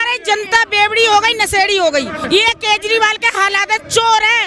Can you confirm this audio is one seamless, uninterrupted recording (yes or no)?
no